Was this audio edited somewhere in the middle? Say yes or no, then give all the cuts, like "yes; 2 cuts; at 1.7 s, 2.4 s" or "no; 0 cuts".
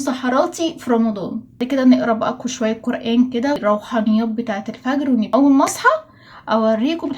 yes; 2 cuts; at 3.6 s, 5.3 s